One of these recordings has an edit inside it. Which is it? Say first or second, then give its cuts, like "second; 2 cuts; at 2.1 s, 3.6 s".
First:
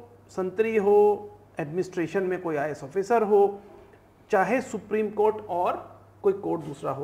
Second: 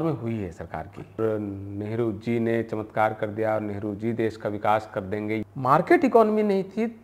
second; 2 cuts; at 1.2 s, 5.4 s